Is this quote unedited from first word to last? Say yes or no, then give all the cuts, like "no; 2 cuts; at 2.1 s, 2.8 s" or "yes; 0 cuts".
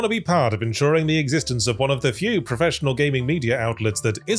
yes; 0 cuts